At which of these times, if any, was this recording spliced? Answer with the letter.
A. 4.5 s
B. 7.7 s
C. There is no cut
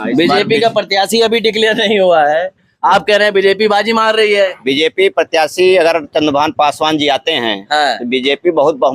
C